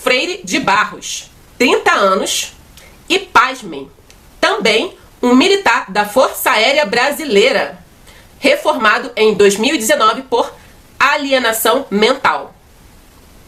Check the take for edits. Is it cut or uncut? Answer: uncut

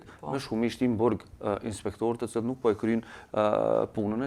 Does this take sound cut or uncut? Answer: uncut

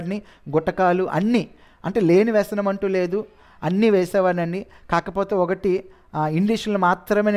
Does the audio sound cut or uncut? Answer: uncut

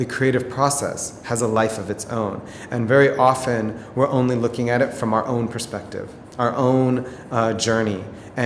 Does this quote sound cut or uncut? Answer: uncut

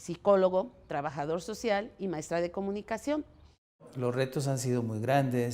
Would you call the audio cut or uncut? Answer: cut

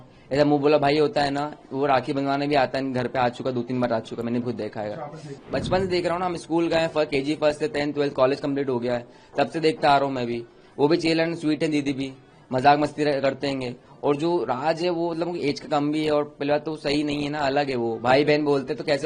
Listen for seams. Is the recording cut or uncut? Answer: cut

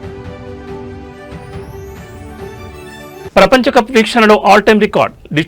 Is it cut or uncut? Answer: cut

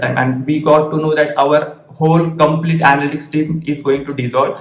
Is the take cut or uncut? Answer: uncut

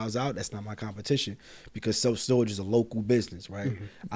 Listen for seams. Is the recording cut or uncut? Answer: uncut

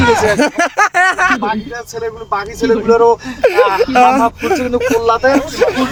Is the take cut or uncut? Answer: uncut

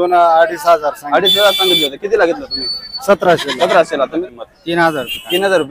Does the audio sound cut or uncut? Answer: cut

